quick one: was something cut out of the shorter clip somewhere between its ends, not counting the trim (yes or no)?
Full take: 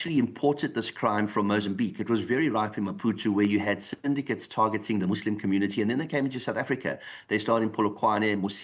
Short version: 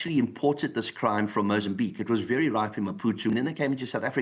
yes